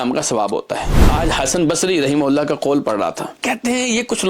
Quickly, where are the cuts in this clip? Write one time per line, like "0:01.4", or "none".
0:01.1
0:03.4